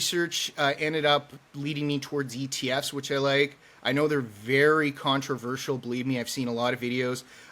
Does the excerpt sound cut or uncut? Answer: uncut